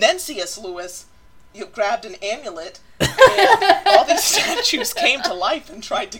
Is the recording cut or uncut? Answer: uncut